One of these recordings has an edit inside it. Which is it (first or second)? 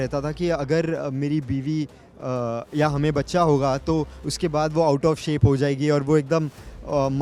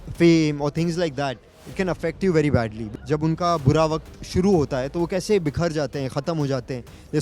second